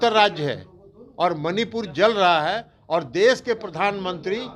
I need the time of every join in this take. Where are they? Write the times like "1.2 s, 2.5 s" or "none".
none

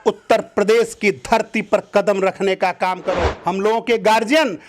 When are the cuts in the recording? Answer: 3.3 s

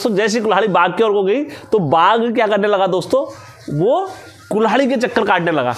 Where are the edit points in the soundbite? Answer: none

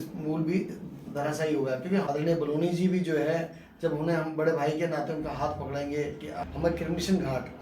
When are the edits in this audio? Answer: 2.1 s, 6.4 s

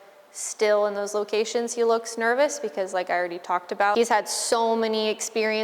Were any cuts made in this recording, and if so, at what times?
3.9 s

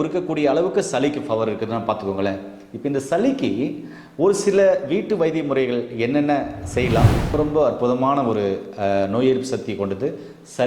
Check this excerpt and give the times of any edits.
7.3 s

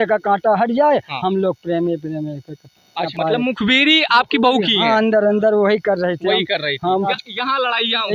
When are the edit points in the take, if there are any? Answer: 3.1 s, 7.1 s

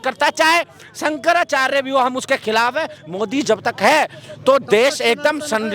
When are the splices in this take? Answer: none

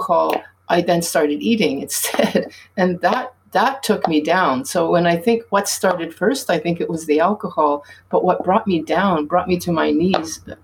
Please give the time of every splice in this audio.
none

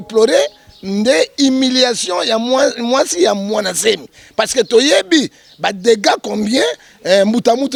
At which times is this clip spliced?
none

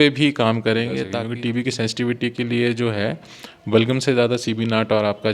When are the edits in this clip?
1.0 s

